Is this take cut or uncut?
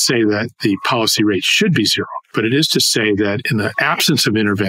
uncut